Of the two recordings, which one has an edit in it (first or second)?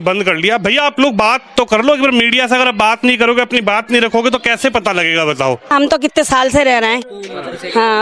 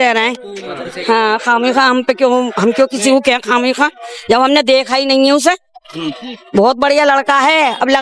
first